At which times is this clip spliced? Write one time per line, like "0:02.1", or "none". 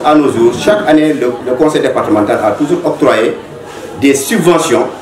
0:01.4